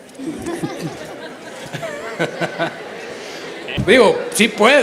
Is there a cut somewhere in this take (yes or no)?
yes